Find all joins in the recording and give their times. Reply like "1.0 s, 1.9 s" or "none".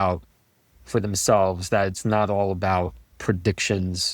3.1 s